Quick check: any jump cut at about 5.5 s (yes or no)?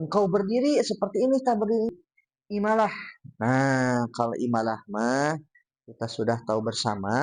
no